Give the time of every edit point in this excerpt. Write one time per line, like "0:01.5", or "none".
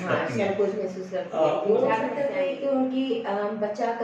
0:02.1